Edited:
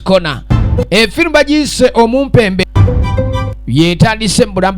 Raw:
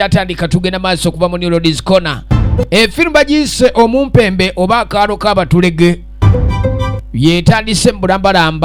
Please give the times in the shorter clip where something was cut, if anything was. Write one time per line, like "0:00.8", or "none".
0:02.7